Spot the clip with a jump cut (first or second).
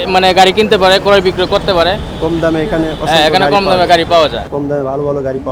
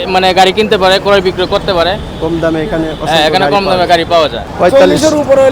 second